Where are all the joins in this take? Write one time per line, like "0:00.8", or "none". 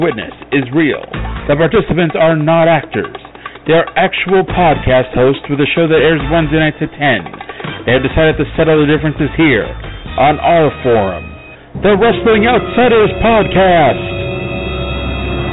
none